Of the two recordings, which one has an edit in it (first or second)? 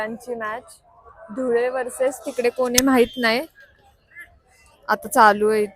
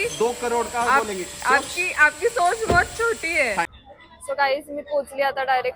second